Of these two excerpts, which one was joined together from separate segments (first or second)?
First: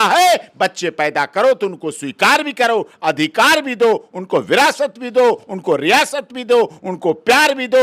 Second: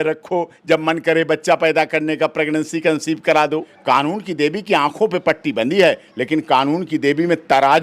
second